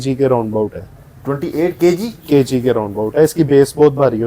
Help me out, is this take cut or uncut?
uncut